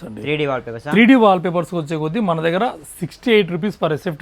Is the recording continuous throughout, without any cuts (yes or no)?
yes